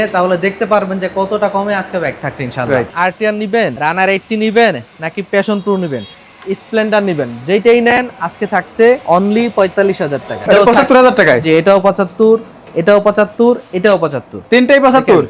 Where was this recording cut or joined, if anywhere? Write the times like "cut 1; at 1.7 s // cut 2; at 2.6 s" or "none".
cut 1; at 3.3 s // cut 2; at 9.0 s // cut 3; at 10.3 s

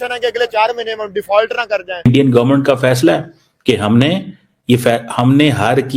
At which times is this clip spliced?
cut 1; at 2.1 s

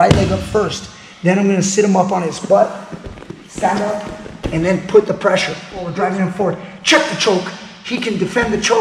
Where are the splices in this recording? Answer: cut 1; at 5.8 s

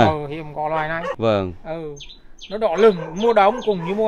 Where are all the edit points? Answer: none

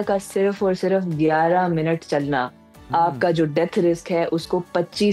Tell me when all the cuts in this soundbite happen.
none

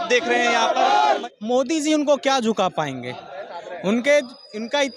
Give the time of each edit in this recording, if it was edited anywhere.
cut 1; at 1.2 s

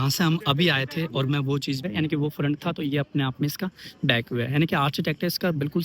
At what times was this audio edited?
cut 1; at 1.8 s

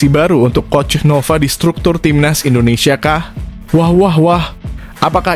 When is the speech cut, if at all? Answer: none

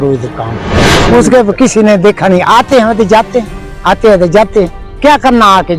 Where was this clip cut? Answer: cut 1; at 0.9 s

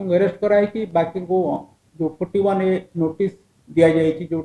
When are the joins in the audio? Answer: none

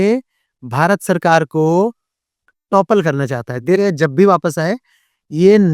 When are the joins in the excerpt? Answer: cut 1; at 3.8 s

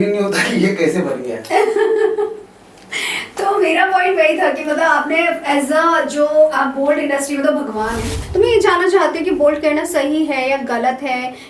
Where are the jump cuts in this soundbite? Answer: cut 1; at 8.2 s

